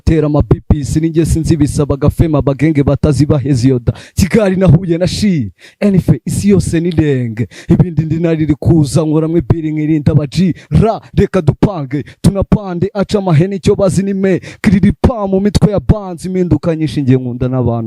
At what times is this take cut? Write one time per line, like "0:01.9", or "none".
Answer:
none